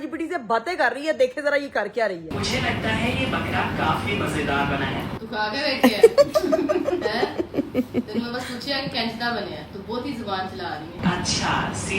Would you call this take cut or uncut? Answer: uncut